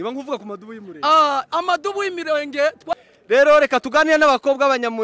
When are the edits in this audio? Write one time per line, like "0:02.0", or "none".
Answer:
0:02.9

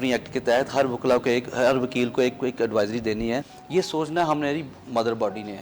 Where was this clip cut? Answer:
0:03.6

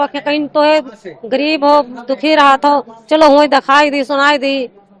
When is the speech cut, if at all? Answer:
none

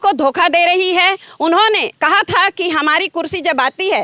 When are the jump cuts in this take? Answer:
none

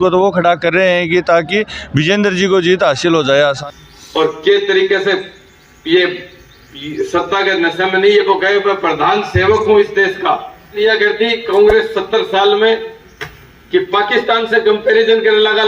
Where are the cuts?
0:03.6
0:10.8

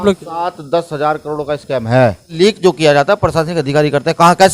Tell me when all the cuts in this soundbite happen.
0:02.3

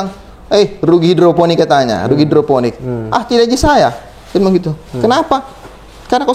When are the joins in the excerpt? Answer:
none

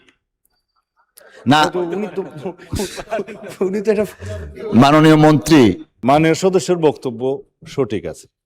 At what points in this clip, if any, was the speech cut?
0:05.9

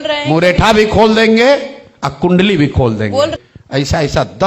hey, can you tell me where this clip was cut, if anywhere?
0:03.3

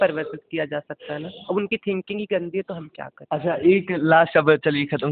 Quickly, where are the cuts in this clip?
none

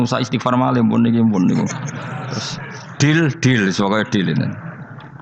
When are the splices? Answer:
none

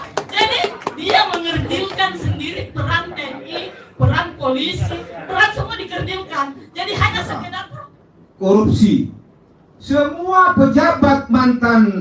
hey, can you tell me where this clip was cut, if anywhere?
0:07.6

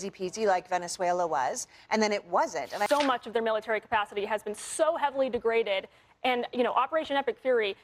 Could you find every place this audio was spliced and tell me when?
0:02.9

